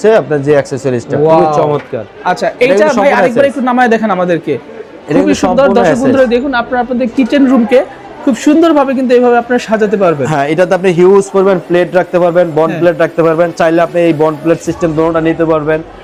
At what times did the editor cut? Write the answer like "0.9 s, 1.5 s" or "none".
none